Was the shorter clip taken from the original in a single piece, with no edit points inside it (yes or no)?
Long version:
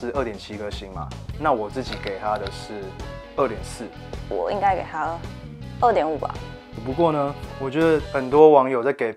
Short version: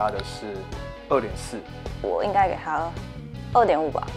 yes